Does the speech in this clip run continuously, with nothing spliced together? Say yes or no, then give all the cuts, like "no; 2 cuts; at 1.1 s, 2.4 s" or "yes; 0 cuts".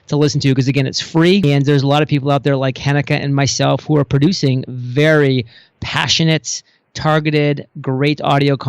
no; 1 cut; at 1.4 s